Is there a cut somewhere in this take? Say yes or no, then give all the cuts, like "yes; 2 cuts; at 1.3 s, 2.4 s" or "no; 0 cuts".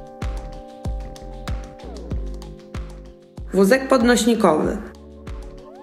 yes; 2 cuts; at 3.0 s, 5.0 s